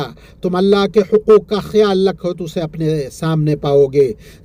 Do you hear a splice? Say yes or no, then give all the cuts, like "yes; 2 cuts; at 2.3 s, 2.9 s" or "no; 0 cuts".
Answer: no; 0 cuts